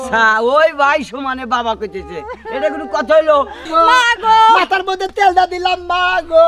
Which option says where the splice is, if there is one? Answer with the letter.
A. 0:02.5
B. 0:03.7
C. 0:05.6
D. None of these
B